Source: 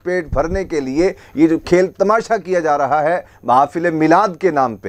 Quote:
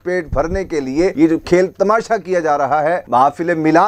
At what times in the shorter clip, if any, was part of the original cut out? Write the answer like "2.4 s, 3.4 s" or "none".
1.1 s, 3.0 s